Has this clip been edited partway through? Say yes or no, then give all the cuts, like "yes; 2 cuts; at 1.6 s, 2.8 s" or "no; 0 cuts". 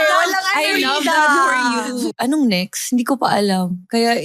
yes; 1 cut; at 2.2 s